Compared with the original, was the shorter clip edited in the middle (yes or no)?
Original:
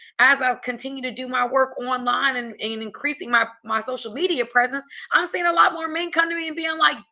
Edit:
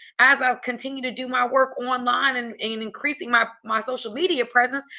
no